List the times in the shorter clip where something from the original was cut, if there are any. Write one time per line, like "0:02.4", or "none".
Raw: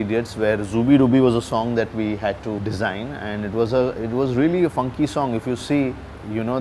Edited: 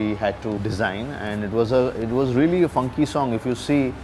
none